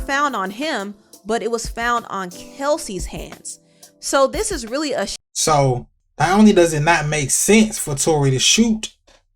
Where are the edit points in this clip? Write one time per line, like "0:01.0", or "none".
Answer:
0:05.2
0:06.0